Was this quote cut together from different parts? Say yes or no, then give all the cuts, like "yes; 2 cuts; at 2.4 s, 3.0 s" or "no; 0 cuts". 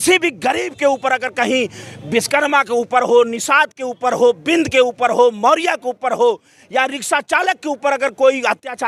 no; 0 cuts